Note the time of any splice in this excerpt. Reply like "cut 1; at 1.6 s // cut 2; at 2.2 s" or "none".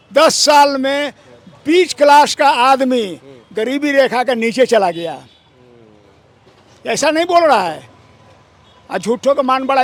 none